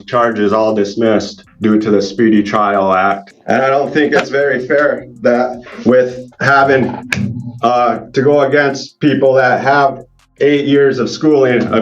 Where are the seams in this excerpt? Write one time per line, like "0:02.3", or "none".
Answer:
0:01.4
0:03.3